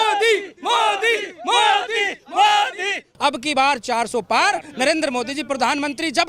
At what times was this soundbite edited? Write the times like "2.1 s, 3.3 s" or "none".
3.1 s